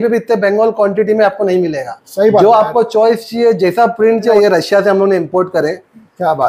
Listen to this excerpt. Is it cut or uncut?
cut